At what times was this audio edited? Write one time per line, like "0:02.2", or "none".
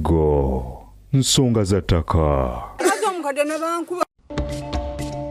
0:02.6
0:04.0